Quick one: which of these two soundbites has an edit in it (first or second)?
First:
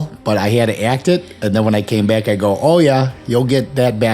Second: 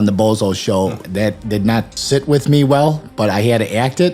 second